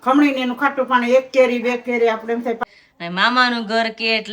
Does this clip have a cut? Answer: yes; 1 cut; at 2.6 s

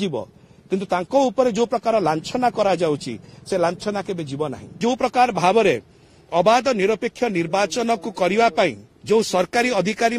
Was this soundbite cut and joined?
yes; 2 cuts; at 4.8 s, 8.9 s

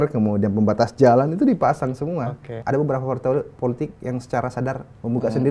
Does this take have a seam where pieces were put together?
yes; 1 cut; at 2.6 s

